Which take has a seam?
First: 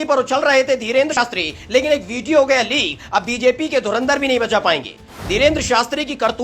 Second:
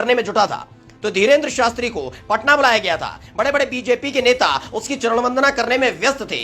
first; 1 cut; at 1.2 s

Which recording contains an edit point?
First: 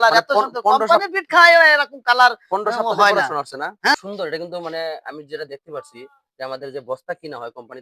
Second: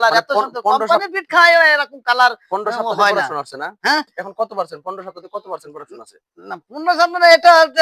first; 1 cut; at 3.9 s

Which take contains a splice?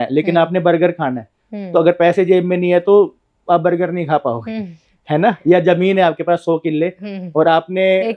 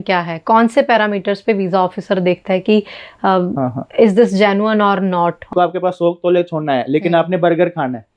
second; 1 cut; at 5.5 s

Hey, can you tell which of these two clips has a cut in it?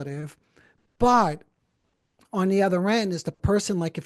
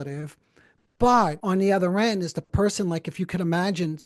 second; 1 cut; at 1.4 s

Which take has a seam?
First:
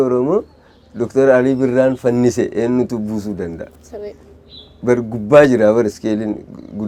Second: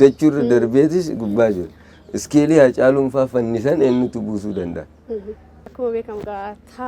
second; 1 cut; at 5.7 s

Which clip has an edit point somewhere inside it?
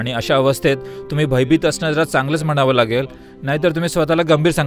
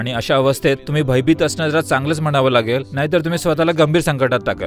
second; 2 cuts; at 0.9 s, 2.9 s

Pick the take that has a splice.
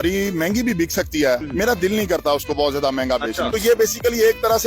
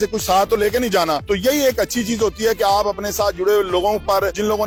first; 1 cut; at 3.5 s

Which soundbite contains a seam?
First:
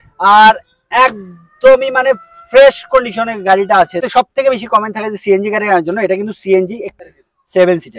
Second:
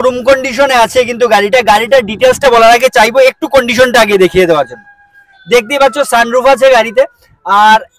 first; 2 cuts; at 4.0 s, 7.0 s

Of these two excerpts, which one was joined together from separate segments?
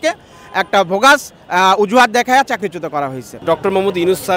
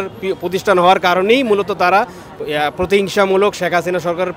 first; 1 cut; at 3.3 s

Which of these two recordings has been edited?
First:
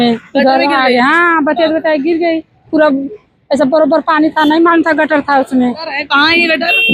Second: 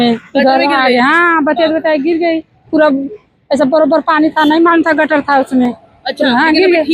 first; 1 cut; at 5.9 s

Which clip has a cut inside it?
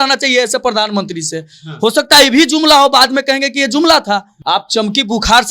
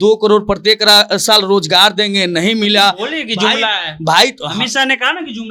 first; 1 cut; at 4.3 s

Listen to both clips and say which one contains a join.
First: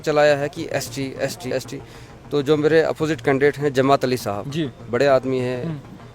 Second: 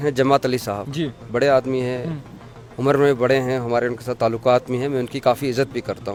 first; 1 cut; at 1.5 s

